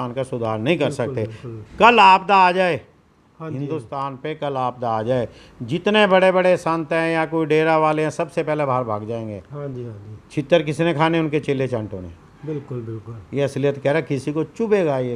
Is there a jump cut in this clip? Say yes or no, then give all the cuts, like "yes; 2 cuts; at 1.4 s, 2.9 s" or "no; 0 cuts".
no; 0 cuts